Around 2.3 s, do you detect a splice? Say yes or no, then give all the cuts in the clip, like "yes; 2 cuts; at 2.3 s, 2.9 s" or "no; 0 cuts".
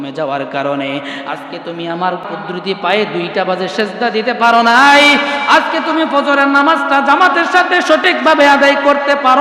yes; 1 cut; at 2.3 s